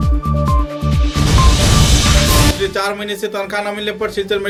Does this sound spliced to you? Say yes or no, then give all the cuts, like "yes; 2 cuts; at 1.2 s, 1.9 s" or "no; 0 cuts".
no; 0 cuts